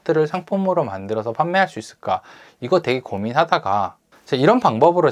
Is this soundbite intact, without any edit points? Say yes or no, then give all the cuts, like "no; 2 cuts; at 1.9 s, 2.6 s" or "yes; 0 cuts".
no; 1 cut; at 4.0 s